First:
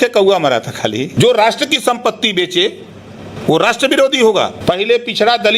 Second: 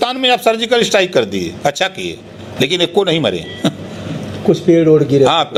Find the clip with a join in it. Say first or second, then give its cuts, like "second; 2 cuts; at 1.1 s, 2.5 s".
first; 2 cuts; at 1.1 s, 4.6 s